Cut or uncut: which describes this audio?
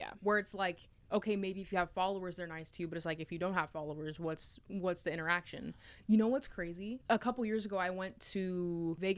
cut